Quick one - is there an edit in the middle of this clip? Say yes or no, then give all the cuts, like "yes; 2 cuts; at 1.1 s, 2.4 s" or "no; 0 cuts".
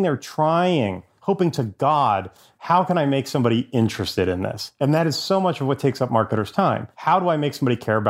yes; 3 cuts; at 1.1 s, 4.6 s, 6.9 s